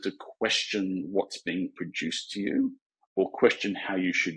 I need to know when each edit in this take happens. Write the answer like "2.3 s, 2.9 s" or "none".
none